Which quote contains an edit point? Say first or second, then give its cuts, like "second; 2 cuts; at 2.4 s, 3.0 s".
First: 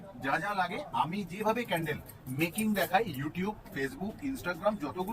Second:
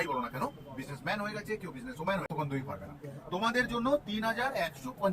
second; 1 cut; at 2.3 s